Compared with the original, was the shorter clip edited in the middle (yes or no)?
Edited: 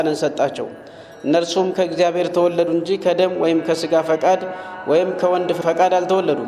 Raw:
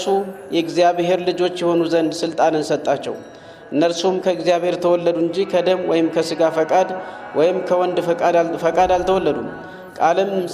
yes